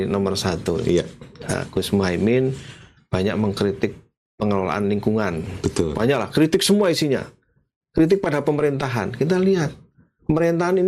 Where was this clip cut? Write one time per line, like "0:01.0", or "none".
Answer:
none